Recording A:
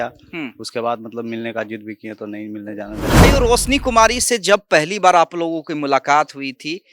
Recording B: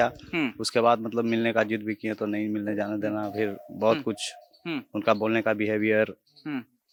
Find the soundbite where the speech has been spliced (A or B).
A